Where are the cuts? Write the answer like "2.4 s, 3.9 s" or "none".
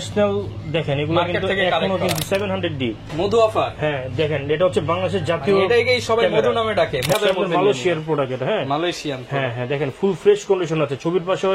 2.2 s, 7.1 s